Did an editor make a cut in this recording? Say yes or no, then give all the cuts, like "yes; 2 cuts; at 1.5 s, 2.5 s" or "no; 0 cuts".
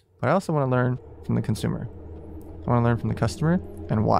no; 0 cuts